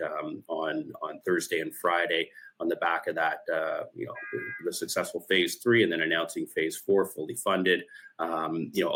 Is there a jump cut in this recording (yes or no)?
no